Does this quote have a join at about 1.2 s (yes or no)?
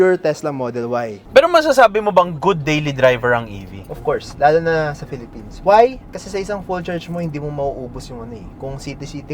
yes